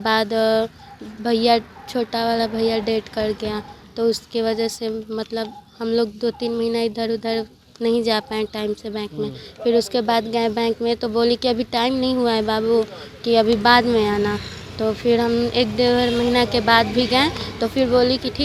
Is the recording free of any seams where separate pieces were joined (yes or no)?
yes